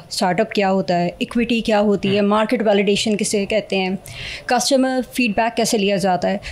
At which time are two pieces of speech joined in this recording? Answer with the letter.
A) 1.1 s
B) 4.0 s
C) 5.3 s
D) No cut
D